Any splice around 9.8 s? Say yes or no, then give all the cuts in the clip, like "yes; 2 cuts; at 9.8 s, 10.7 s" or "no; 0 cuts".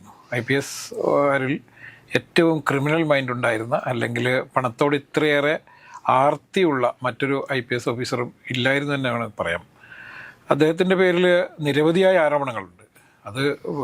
no; 0 cuts